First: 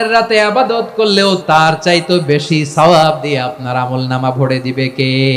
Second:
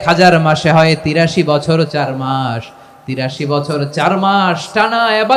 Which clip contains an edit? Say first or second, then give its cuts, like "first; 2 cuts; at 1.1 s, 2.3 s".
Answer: first; 1 cut; at 1.4 s